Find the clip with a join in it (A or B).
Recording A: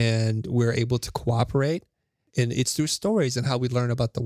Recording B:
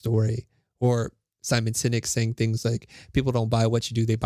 A